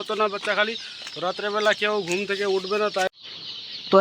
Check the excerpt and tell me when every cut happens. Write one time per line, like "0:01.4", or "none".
0:03.1